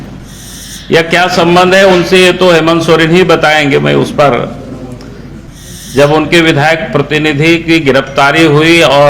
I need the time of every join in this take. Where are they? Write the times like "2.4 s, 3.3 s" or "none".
5.5 s